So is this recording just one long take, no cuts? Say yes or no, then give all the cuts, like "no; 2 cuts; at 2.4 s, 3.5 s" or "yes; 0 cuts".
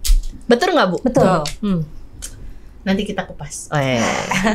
yes; 0 cuts